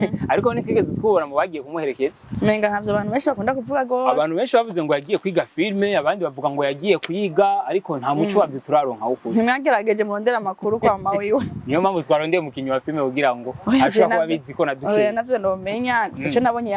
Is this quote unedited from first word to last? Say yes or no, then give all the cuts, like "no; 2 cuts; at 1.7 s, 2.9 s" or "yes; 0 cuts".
no; 1 cut; at 2.2 s